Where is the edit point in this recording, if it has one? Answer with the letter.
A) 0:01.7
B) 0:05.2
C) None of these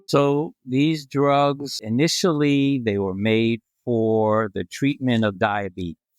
A